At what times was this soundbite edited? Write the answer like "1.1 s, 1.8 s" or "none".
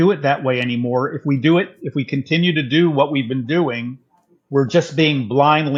none